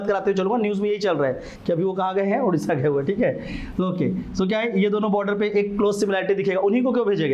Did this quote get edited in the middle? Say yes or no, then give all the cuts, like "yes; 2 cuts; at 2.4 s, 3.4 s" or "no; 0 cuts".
no; 0 cuts